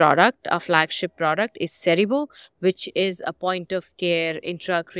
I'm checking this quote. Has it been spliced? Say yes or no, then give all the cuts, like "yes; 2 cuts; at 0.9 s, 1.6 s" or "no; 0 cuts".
no; 0 cuts